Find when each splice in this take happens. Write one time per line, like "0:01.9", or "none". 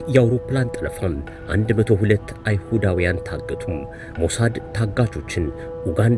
none